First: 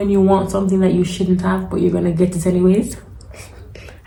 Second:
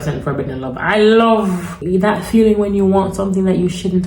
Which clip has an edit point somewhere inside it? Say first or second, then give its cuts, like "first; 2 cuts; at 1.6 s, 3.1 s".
second; 1 cut; at 1.7 s